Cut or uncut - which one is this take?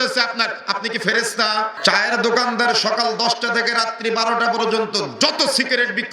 cut